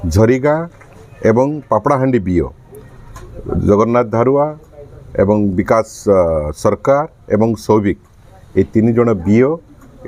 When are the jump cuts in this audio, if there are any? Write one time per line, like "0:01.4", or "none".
none